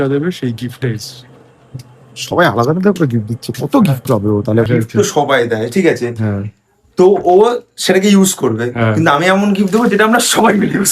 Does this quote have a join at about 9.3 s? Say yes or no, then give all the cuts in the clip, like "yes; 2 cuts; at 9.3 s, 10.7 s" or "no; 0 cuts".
no; 1 cut; at 4.7 s